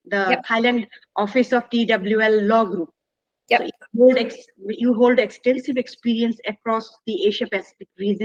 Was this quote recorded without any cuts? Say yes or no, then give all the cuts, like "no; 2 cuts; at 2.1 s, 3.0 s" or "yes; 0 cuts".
yes; 0 cuts